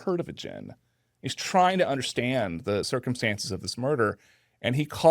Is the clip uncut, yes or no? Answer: no